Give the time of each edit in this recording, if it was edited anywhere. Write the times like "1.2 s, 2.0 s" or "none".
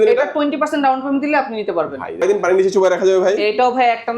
2.2 s